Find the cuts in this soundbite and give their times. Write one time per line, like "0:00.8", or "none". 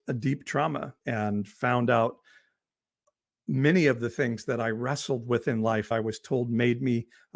0:00.9
0:05.9